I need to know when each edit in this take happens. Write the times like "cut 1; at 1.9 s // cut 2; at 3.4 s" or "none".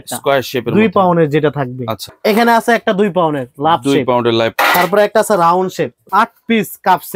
cut 1; at 2.1 s // cut 2; at 4.5 s // cut 3; at 6.0 s